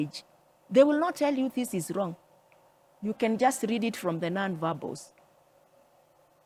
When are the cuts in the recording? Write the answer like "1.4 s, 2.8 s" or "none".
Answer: none